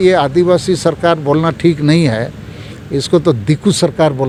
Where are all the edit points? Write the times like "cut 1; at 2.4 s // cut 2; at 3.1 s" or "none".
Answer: none